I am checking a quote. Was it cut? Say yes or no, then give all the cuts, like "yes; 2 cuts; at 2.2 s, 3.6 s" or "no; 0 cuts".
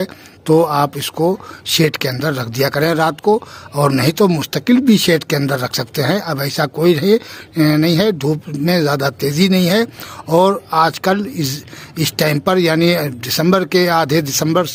no; 0 cuts